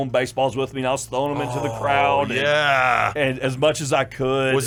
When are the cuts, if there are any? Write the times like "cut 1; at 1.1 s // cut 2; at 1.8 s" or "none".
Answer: none